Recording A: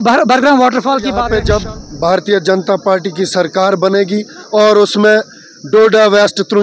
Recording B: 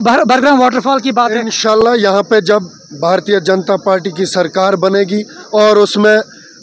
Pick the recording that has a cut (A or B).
A